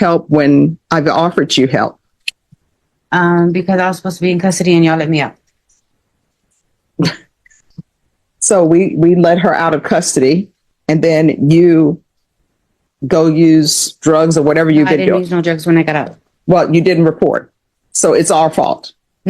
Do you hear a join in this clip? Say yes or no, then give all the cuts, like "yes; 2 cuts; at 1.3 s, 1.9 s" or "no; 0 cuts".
no; 0 cuts